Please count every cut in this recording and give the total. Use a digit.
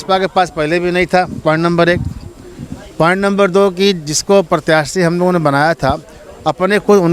0